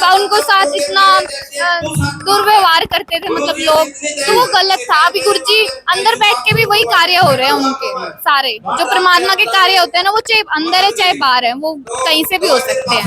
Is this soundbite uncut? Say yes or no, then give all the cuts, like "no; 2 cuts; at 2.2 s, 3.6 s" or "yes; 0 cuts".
yes; 0 cuts